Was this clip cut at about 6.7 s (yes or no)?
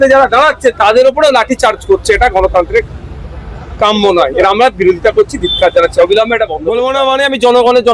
yes